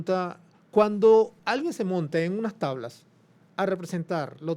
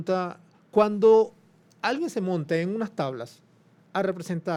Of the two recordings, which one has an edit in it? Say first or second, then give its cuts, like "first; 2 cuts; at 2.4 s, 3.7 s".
first; 1 cut; at 1.4 s